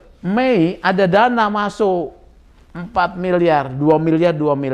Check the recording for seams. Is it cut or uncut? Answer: uncut